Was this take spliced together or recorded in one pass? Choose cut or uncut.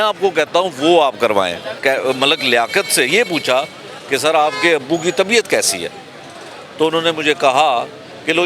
cut